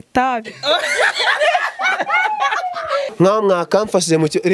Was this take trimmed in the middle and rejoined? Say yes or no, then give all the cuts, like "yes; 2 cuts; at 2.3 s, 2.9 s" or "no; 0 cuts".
yes; 1 cut; at 3.1 s